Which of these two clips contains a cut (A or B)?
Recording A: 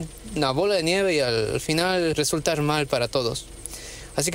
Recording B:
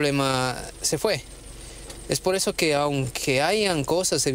A